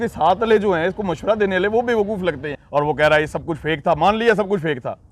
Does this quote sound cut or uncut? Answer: cut